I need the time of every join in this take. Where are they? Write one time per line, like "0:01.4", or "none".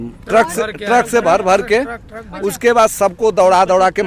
none